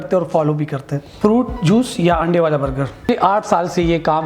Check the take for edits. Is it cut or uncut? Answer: cut